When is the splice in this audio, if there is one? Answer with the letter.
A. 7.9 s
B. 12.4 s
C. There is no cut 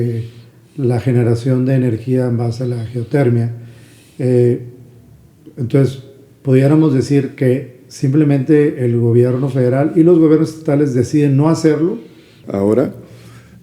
B